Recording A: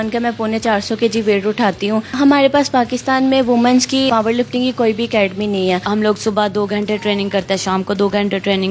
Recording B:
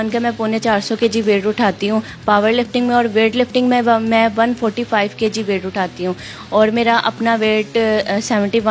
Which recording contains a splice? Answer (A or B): A